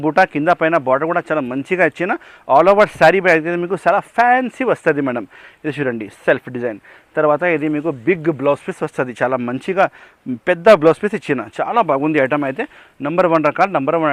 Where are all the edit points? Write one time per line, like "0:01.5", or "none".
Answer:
none